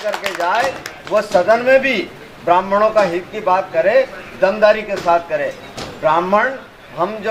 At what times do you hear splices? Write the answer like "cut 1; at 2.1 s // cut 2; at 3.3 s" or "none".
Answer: none